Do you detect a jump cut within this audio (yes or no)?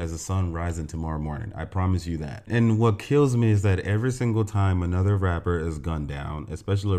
no